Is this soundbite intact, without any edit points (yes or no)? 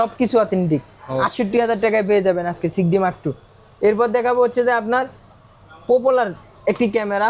yes